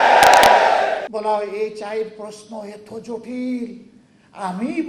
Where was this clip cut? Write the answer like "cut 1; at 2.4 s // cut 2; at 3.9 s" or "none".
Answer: cut 1; at 1.1 s